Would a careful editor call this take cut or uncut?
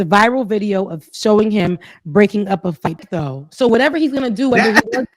cut